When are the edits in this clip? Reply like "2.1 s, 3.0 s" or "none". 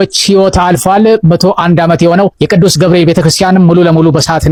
none

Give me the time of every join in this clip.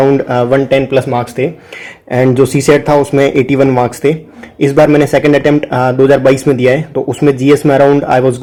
none

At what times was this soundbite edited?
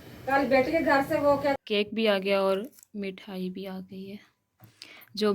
1.6 s

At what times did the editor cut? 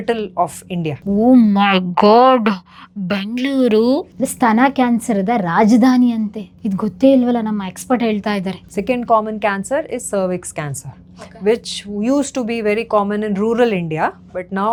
none

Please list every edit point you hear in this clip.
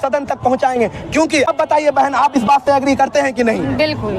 1.5 s

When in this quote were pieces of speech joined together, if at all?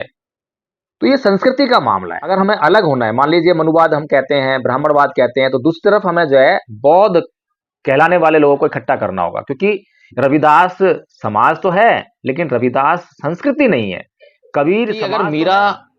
2.2 s, 15.0 s

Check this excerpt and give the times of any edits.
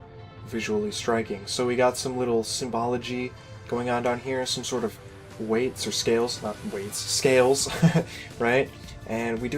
5.0 s

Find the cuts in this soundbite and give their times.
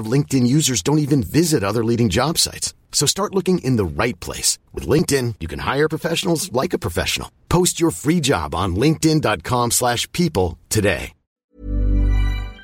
11.5 s

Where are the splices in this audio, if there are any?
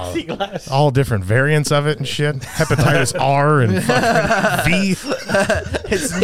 none

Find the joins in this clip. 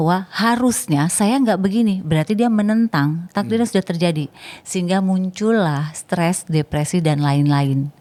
none

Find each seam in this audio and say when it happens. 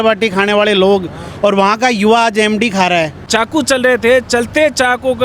3.2 s

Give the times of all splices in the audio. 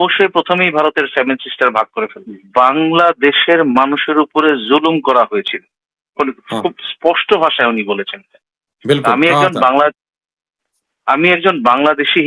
2.3 s

